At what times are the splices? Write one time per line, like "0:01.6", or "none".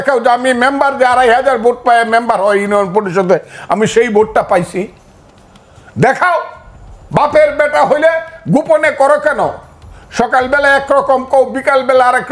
none